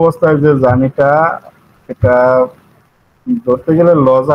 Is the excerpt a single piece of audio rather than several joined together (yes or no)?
yes